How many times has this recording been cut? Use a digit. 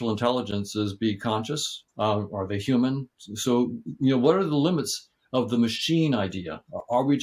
0